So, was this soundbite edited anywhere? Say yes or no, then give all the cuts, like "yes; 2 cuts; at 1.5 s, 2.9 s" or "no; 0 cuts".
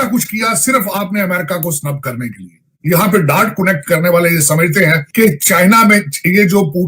yes; 2 cuts; at 2.8 s, 5.1 s